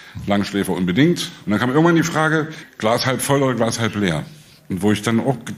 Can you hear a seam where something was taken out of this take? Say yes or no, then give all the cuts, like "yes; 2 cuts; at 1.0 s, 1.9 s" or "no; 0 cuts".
yes; 2 cuts; at 1.3 s, 2.6 s